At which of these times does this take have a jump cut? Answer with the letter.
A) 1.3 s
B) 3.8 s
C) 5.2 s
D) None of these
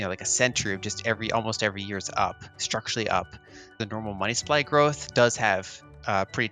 B